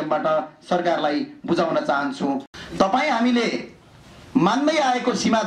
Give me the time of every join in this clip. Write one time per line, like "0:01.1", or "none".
0:02.5